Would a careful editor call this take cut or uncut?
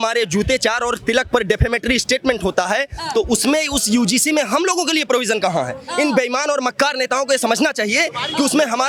uncut